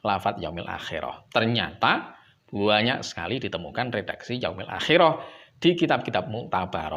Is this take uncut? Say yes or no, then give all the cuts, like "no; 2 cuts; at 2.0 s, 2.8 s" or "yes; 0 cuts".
no; 1 cut; at 1.2 s